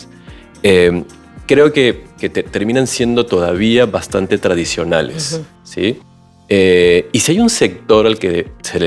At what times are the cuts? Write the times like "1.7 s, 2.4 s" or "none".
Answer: none